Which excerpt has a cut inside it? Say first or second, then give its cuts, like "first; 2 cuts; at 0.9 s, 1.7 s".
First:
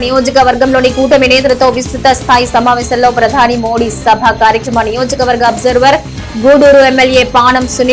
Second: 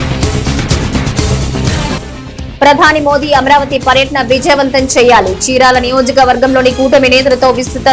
second; 1 cut; at 1.7 s